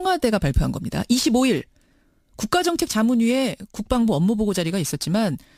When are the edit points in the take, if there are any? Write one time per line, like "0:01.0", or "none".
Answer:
none